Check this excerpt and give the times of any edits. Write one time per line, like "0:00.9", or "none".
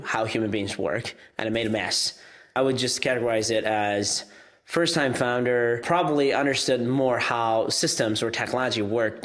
0:02.5
0:05.8